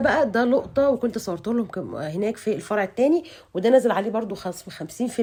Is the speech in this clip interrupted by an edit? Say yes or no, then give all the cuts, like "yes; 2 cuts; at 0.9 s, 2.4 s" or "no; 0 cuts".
no; 0 cuts